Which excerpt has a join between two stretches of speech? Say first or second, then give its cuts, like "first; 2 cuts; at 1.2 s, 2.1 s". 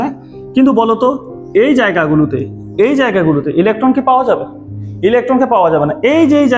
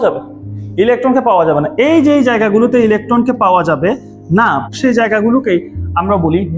second; 1 cut; at 4.7 s